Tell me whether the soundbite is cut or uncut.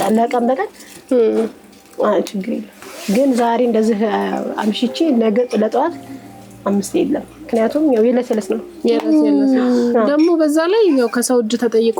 uncut